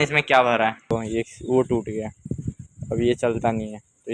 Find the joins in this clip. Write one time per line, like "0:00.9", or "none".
0:00.9